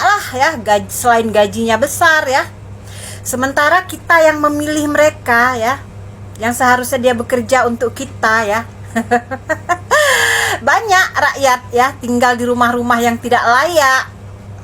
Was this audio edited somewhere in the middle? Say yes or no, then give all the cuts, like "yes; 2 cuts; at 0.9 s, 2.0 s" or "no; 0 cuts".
no; 0 cuts